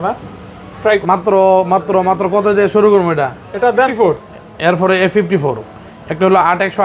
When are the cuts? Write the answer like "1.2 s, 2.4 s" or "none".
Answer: 0.8 s, 3.9 s